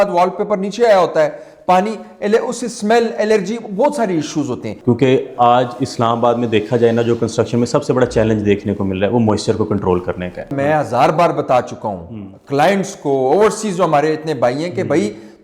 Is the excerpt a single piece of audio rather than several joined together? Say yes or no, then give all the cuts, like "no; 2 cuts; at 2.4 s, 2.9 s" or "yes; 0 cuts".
no; 2 cuts; at 4.7 s, 10.5 s